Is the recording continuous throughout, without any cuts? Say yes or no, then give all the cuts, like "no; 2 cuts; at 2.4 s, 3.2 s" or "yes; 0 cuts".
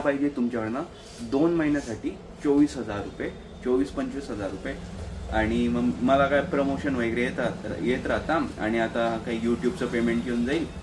yes; 0 cuts